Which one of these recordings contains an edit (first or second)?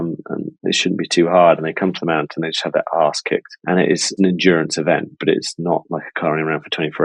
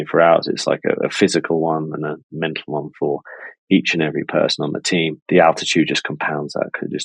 second